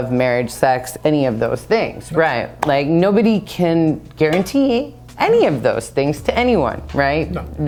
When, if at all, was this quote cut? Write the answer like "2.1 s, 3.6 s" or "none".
none